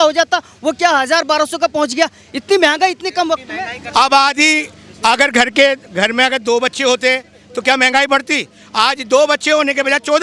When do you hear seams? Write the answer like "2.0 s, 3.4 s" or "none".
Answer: none